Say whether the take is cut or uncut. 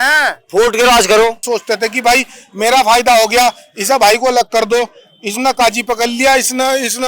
cut